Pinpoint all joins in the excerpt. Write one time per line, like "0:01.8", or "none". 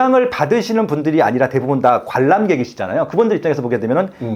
none